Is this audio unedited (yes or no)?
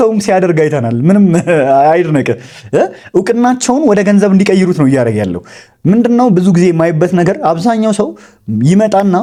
yes